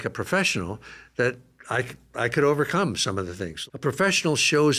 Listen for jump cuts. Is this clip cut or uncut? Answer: cut